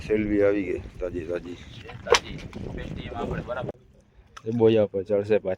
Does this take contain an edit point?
yes; 1 cut; at 3.7 s

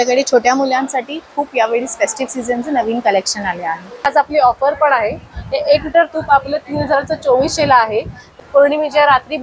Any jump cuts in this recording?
yes; 2 cuts; at 4.0 s, 8.4 s

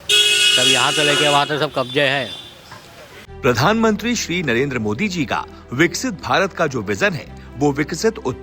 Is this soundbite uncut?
yes; 0 cuts

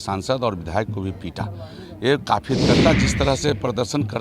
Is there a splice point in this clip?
yes; 1 cut; at 2.7 s

